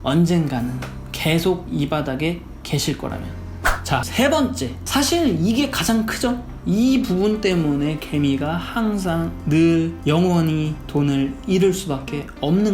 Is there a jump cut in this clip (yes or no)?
yes